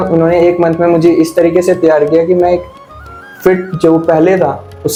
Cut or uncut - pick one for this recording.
uncut